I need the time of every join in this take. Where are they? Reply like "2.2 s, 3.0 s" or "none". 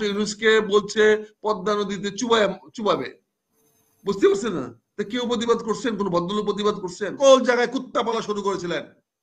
7.2 s